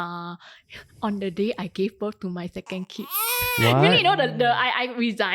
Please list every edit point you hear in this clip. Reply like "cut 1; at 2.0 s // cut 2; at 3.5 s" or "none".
none